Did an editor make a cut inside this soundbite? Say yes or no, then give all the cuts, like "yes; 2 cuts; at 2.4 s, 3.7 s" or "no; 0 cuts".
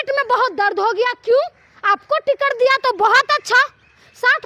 no; 0 cuts